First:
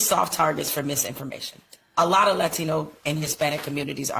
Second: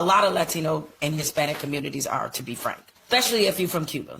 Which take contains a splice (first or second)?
second